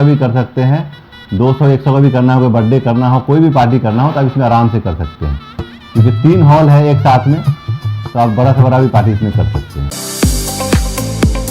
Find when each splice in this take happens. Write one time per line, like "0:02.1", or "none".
0:09.9